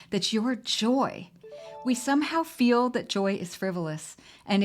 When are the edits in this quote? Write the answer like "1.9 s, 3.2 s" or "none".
1.5 s